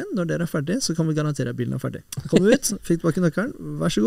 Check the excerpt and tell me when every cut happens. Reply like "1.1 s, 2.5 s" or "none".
2.1 s